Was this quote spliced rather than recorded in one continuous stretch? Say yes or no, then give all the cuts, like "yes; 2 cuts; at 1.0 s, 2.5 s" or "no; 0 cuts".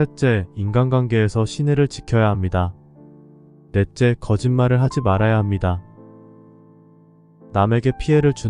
yes; 2 cuts; at 5.8 s, 7.5 s